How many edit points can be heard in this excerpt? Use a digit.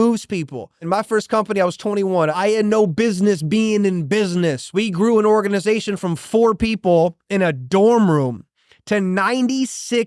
3